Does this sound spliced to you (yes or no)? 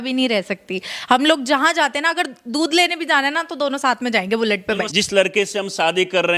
yes